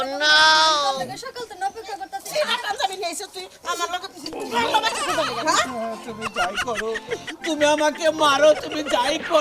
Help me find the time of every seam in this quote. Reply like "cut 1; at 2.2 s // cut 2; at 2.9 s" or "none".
cut 1; at 2.2 s

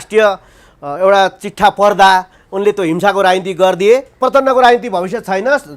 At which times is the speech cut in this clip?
cut 1; at 4.2 s

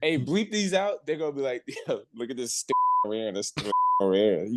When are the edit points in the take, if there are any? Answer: cut 1; at 2.7 s

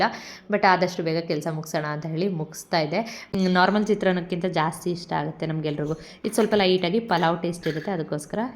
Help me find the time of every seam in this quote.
cut 1; at 3.2 s

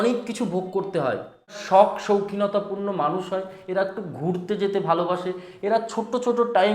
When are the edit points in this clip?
cut 1; at 1.6 s

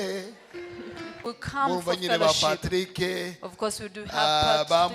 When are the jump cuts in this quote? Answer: cut 1; at 1.2 s

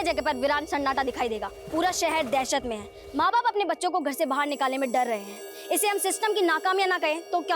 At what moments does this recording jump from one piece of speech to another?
cut 1; at 1.5 s

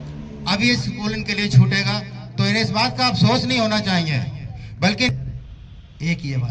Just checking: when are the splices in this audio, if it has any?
cut 1; at 5.1 s

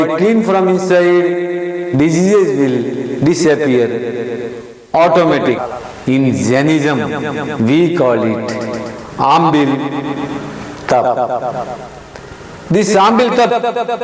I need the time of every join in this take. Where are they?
cut 1; at 5.6 s

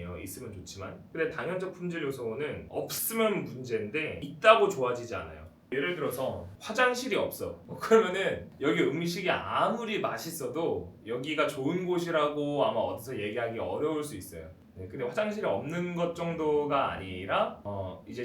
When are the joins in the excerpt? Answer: cut 1; at 1.0 s // cut 2; at 2.6 s // cut 3; at 4.2 s // cut 4; at 5.7 s // cut 5; at 6.5 s // cut 6; at 7.7 s // cut 7; at 8.5 s

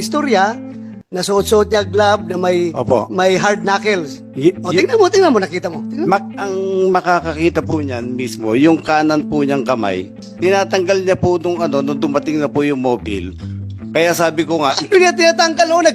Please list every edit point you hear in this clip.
cut 1; at 10.2 s

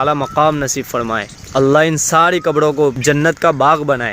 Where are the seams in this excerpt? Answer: cut 1; at 1.3 s // cut 2; at 3.0 s

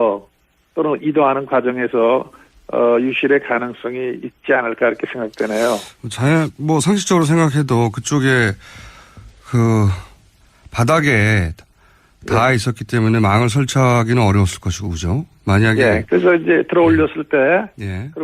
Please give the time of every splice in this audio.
cut 1; at 3.7 s

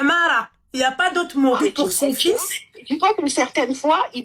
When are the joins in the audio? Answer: cut 1; at 1.6 s

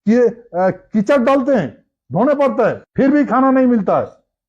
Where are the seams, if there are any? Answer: cut 1; at 2.8 s

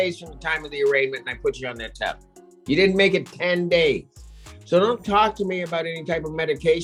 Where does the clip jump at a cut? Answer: none

